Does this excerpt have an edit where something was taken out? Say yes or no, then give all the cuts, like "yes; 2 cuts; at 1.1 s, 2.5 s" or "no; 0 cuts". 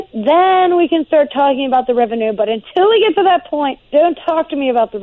yes; 1 cut; at 3.8 s